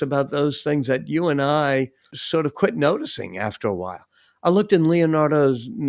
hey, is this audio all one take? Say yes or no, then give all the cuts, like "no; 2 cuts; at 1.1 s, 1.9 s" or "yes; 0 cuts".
yes; 0 cuts